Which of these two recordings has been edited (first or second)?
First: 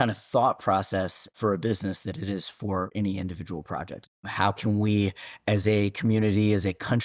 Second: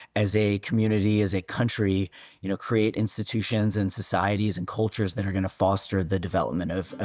first